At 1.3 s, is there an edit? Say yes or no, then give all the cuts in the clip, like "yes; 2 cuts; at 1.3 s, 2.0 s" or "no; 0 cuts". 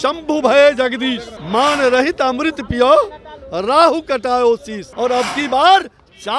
yes; 2 cuts; at 1.3 s, 4.8 s